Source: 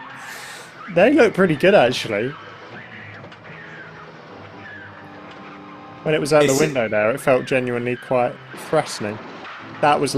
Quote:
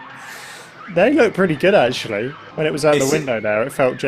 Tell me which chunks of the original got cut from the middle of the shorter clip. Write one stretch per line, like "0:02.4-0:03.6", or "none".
0:02.4-0:05.9